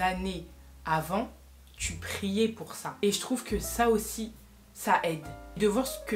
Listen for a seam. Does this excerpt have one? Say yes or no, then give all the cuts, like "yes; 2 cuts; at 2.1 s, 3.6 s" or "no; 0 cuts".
no; 0 cuts